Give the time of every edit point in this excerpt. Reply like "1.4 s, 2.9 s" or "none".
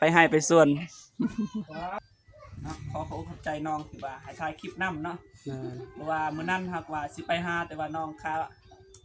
2.0 s